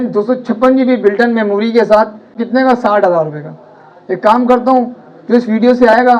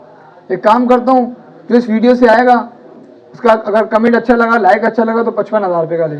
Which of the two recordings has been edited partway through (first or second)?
first